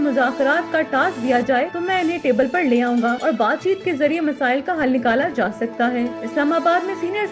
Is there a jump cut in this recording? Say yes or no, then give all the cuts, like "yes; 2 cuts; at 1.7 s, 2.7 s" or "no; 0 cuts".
no; 0 cuts